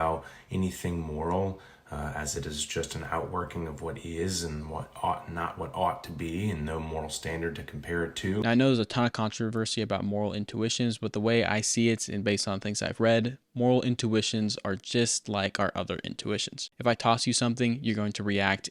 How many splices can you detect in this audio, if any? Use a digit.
0